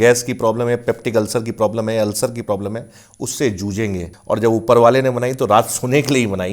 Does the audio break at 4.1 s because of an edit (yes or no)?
yes